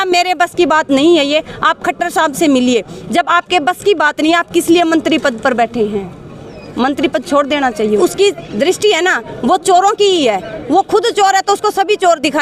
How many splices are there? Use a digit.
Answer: 1